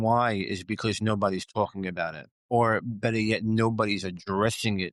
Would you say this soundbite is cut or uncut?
cut